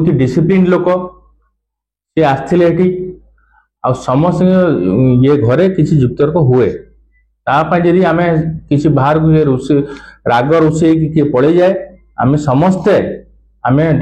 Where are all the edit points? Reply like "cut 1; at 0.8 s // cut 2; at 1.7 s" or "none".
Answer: none